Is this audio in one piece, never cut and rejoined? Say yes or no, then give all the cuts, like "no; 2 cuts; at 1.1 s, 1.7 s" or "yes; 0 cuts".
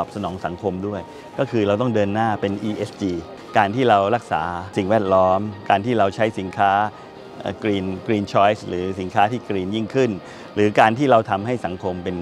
no; 2 cuts; at 3.3 s, 4.6 s